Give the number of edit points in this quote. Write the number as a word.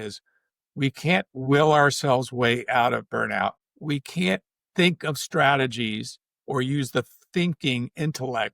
one